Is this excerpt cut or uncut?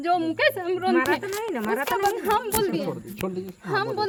uncut